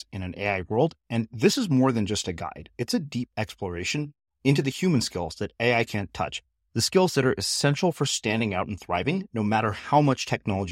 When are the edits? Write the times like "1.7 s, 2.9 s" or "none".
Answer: none